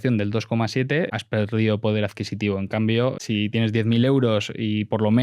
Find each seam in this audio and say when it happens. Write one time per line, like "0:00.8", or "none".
0:01.1
0:03.2